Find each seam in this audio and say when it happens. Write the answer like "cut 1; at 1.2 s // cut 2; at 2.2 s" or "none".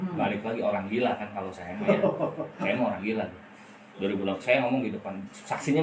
none

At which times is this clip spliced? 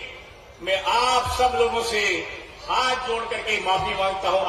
none

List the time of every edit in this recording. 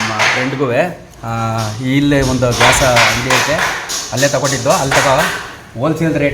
none

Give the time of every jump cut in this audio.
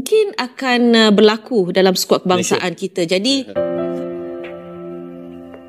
cut 1; at 3.5 s

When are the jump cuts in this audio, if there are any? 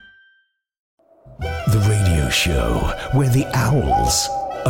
cut 1; at 1.1 s

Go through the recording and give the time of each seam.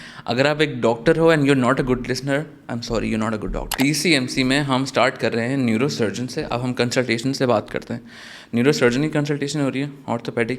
cut 1; at 3.7 s

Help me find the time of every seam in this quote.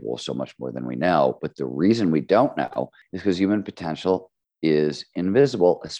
cut 1; at 3.0 s

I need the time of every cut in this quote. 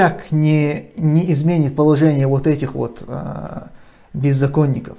none

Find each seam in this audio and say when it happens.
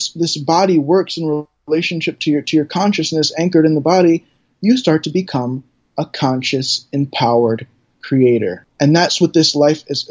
cut 1; at 8.6 s

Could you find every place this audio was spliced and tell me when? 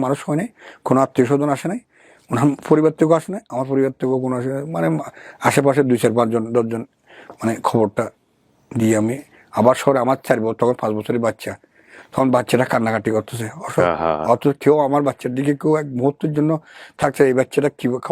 none

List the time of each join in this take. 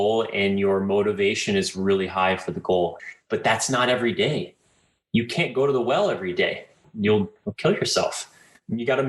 cut 1; at 3.0 s // cut 2; at 6.8 s // cut 3; at 7.4 s

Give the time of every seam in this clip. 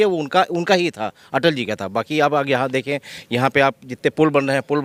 none

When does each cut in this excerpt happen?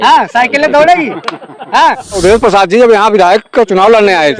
cut 1; at 2.2 s

